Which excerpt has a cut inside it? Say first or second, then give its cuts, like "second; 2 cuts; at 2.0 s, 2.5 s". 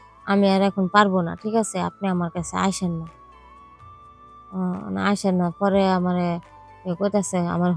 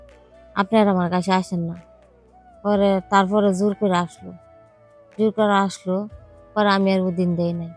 first; 2 cuts; at 3.1 s, 4.5 s